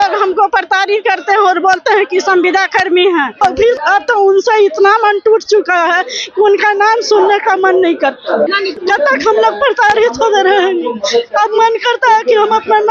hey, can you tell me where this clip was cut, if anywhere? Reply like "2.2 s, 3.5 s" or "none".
3.7 s, 8.7 s

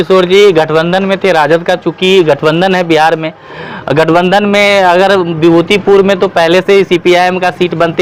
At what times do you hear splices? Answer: none

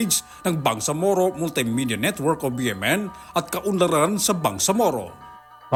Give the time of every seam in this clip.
none

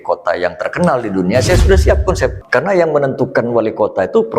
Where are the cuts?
2.4 s

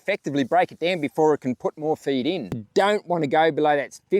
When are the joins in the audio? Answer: 2.6 s

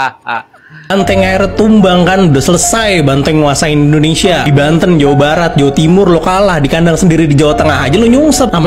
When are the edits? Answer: 0.9 s

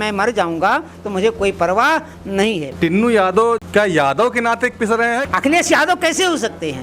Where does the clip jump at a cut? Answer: 2.7 s, 3.6 s, 5.2 s

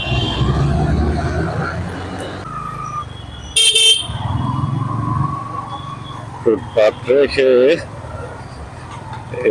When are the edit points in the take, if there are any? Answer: 2.4 s

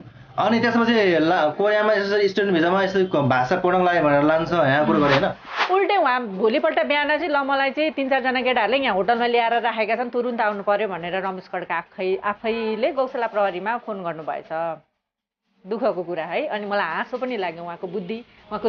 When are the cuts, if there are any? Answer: 5.4 s

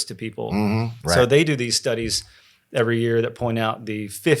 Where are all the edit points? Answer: 0.9 s

